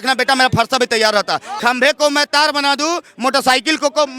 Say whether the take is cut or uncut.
cut